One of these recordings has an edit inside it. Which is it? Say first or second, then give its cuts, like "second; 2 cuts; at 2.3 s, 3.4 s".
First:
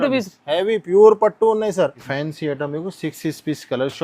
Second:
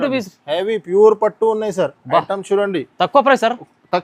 first; 1 cut; at 2.0 s